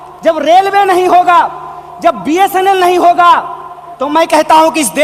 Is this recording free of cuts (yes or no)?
yes